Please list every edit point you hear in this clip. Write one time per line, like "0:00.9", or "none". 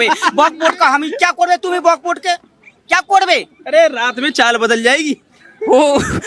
none